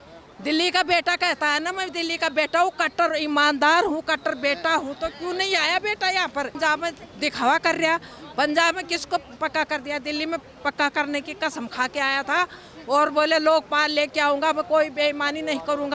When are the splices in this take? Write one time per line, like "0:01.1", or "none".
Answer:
0:06.6

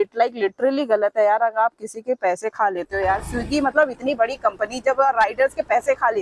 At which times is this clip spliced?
none

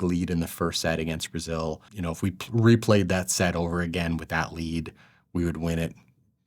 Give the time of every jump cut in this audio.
0:01.9

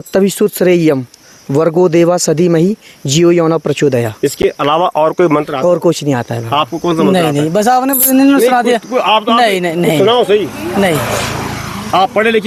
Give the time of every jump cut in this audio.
none

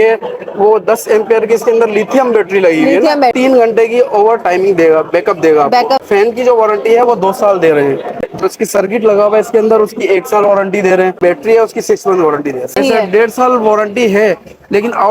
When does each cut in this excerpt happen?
0:03.4
0:06.0
0:08.2
0:11.2
0:12.8

